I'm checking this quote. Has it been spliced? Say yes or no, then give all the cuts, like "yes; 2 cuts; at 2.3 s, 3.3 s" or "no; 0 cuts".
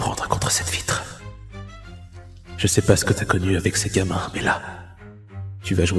yes; 2 cuts; at 1.1 s, 2.6 s